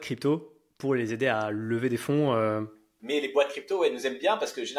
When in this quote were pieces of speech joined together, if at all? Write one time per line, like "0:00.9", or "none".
0:02.9